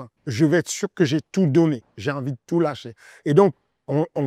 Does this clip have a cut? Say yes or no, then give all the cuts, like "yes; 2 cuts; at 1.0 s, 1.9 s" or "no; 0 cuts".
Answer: no; 0 cuts